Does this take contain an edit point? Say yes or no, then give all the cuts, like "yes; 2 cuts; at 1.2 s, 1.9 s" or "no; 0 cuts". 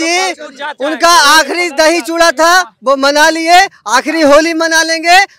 no; 0 cuts